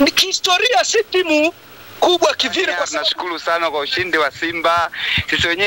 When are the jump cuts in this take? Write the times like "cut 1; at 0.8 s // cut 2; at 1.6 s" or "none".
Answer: cut 1; at 2.9 s